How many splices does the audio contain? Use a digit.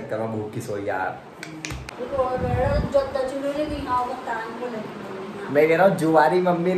1